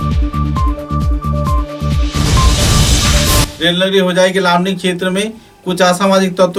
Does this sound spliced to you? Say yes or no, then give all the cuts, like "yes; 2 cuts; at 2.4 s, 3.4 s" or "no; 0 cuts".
no; 0 cuts